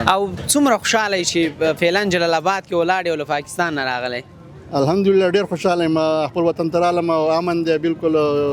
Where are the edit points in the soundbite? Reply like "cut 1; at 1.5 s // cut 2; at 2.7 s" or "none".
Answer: none

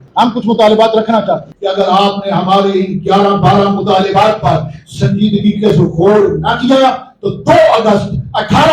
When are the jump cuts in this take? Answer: cut 1; at 1.5 s

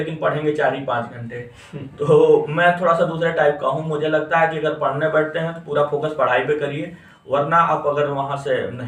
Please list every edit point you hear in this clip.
none

